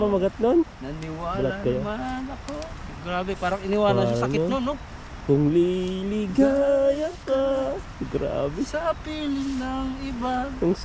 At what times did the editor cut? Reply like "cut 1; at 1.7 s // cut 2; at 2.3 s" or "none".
none